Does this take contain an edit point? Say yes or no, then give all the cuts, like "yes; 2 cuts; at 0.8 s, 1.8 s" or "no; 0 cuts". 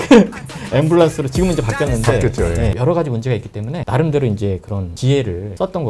no; 0 cuts